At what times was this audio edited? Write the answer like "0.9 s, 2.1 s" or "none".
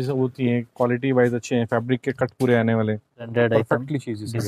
3.3 s

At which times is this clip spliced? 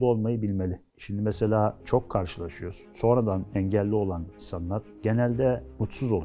none

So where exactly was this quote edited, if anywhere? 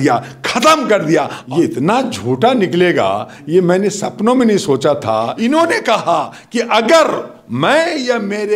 1.4 s, 5.3 s

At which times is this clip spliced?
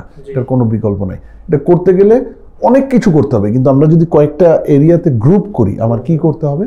none

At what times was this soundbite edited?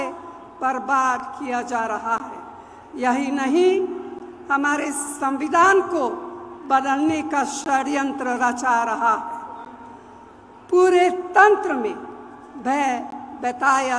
none

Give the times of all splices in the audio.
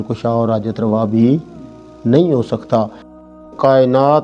3.2 s

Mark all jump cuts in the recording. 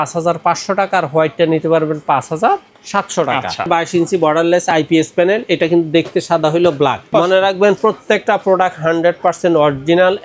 3.7 s, 7.1 s

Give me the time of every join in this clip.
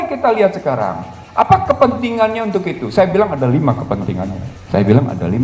4.5 s

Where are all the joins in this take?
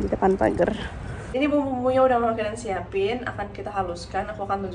1.3 s

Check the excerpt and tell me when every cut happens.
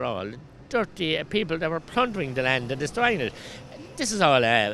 none

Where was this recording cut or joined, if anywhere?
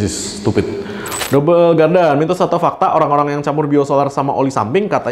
1.1 s

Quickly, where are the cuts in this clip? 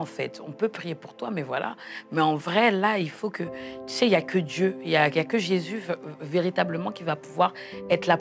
none

